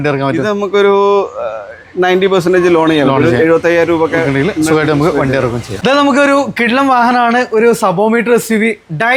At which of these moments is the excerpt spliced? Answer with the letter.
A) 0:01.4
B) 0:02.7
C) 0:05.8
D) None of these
D